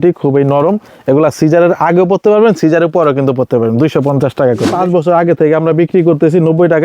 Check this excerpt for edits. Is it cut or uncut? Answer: cut